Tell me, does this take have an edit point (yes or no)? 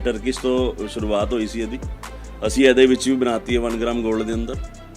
no